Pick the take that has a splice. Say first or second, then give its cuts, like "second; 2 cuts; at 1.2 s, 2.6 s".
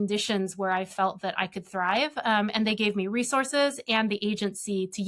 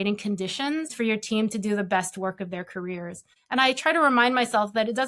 second; 2 cuts; at 0.9 s, 3.3 s